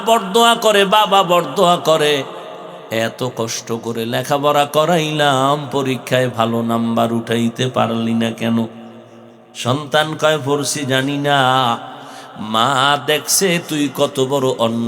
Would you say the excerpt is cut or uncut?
uncut